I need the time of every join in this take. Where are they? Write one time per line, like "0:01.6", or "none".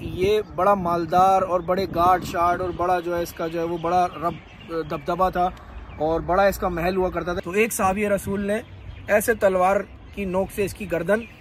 0:07.3